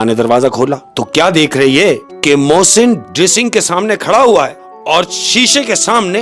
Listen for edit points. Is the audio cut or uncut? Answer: cut